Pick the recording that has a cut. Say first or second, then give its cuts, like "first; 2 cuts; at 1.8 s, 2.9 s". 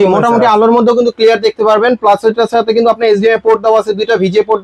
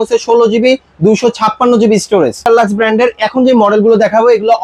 second; 1 cut; at 2.5 s